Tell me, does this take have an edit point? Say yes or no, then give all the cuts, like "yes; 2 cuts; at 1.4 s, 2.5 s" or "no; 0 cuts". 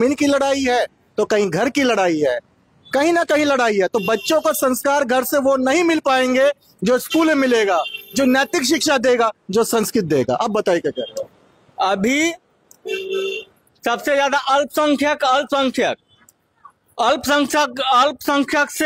no; 0 cuts